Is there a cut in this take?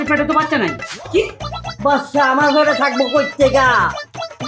no; 0 cuts

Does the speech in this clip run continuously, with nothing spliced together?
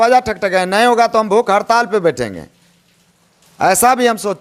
yes; 0 cuts

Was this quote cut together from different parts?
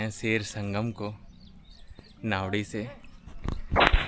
no; 0 cuts

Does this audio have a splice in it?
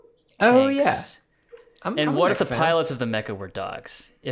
no; 0 cuts

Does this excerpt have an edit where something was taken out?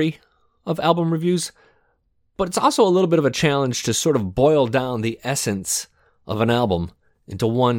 no; 0 cuts

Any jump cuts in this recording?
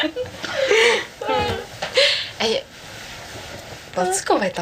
no; 0 cuts

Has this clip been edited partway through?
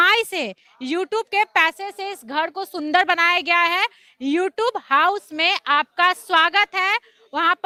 no; 0 cuts

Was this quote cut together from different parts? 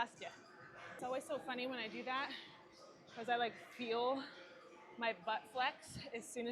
yes; 1 cut; at 1.0 s

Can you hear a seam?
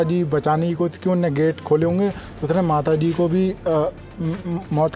no; 0 cuts

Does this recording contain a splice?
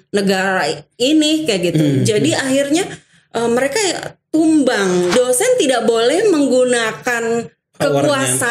yes; 1 cut; at 5.1 s

